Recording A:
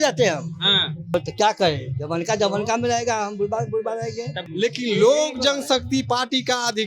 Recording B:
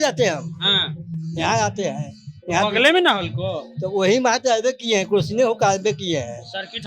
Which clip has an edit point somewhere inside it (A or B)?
A